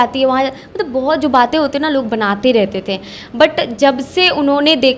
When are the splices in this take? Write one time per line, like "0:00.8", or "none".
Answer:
none

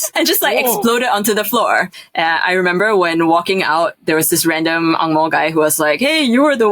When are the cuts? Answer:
0:02.0

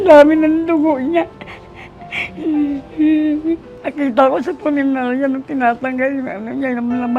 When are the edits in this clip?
0:03.7

